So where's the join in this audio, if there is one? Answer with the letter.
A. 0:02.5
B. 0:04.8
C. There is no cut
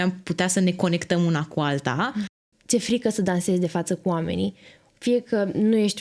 A